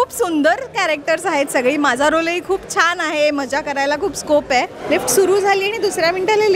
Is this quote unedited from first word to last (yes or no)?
no